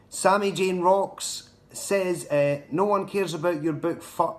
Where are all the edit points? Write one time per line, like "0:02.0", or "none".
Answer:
none